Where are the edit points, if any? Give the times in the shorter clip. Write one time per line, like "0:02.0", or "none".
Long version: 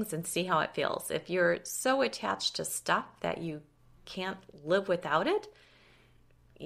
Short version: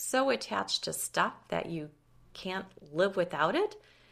none